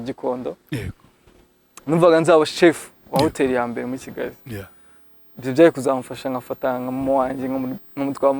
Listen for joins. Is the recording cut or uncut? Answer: uncut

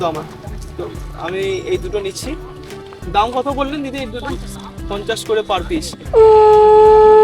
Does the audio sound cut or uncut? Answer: cut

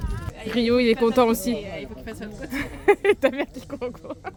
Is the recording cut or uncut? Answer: uncut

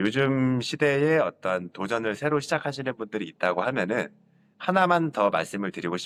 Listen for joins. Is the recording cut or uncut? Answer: uncut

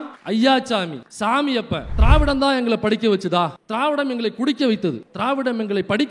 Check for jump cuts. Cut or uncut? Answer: cut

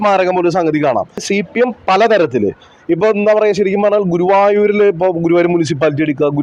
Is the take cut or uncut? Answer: cut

